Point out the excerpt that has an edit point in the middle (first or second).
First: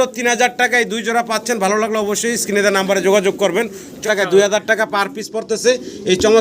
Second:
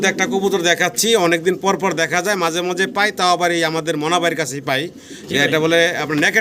first